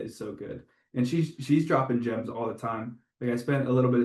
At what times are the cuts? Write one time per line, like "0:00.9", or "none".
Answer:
none